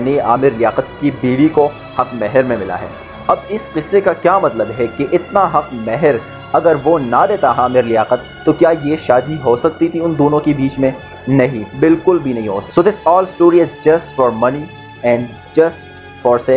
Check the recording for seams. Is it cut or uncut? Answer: uncut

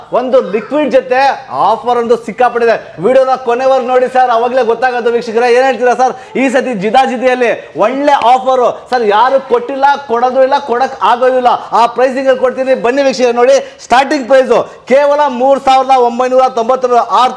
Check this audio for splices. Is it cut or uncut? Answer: uncut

